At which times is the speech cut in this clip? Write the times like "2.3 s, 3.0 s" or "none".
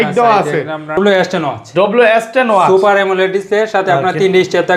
1.0 s